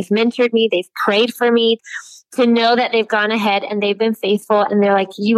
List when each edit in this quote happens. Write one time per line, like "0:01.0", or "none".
0:01.8